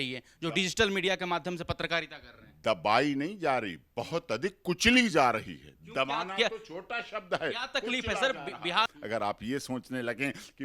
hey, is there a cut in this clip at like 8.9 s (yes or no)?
yes